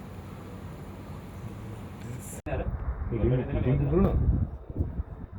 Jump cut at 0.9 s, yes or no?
no